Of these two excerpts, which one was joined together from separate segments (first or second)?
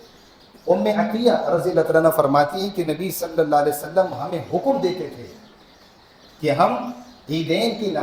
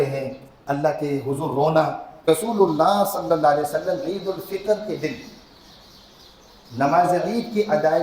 second